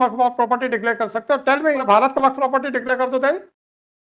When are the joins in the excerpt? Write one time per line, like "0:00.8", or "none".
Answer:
0:01.9